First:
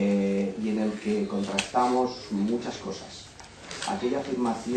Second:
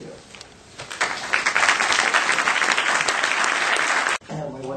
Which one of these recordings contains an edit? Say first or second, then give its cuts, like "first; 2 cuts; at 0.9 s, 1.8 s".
first; 1 cut; at 3.3 s